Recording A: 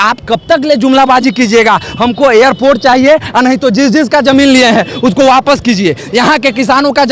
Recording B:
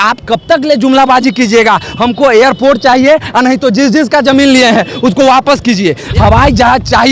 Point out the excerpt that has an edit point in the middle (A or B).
B